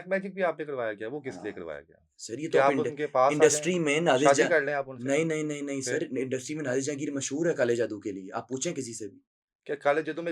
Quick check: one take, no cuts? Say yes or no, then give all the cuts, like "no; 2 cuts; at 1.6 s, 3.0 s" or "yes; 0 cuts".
yes; 0 cuts